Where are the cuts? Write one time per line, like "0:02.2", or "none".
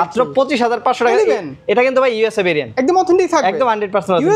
none